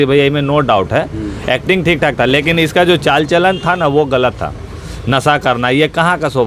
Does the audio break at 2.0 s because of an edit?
no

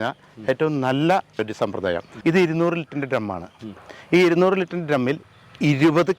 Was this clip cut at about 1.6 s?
yes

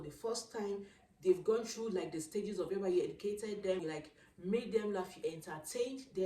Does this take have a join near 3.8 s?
yes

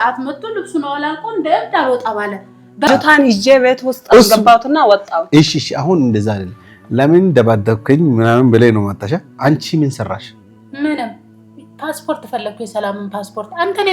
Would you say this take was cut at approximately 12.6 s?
no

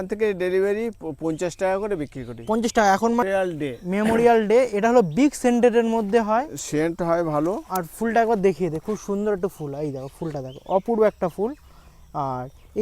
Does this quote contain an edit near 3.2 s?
yes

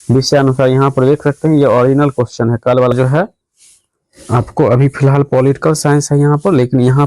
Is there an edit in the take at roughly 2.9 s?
yes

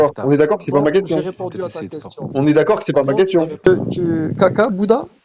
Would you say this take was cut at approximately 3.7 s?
yes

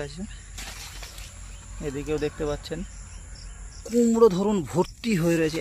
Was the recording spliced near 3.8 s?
yes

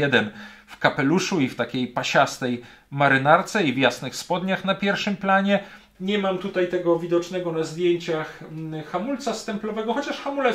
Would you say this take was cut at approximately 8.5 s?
no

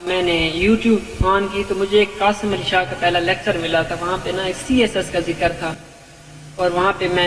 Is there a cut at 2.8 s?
no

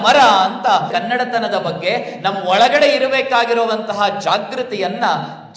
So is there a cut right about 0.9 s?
yes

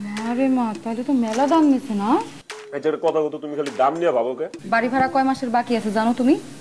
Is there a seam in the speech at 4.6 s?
yes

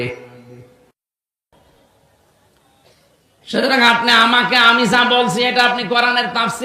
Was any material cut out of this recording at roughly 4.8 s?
no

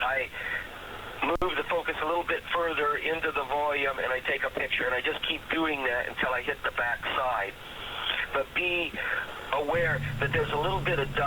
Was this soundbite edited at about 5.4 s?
no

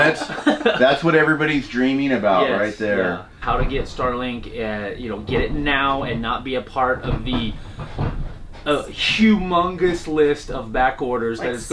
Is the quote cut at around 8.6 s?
no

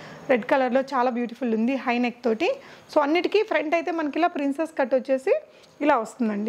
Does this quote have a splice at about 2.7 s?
no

